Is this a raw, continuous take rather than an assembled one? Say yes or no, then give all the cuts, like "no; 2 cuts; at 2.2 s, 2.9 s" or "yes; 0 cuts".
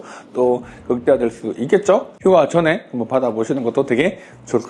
yes; 0 cuts